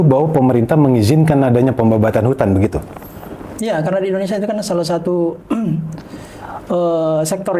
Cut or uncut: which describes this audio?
uncut